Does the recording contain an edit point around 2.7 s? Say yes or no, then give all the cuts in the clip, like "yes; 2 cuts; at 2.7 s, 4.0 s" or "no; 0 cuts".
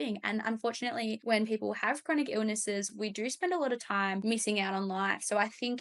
no; 2 cuts; at 1.2 s, 4.2 s